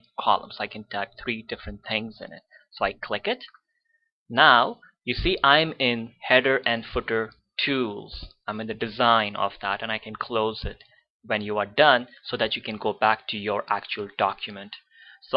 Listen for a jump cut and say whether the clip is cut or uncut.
uncut